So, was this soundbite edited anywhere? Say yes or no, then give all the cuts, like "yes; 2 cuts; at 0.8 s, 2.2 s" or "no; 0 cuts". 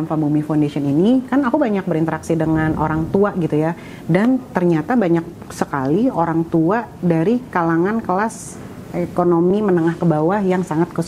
no; 0 cuts